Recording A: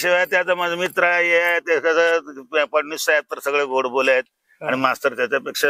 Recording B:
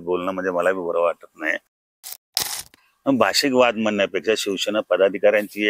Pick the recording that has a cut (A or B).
B